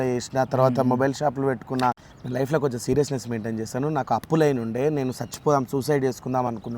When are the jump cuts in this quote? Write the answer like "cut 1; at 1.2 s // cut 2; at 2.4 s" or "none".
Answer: cut 1; at 1.9 s